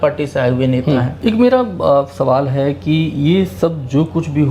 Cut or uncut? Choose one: cut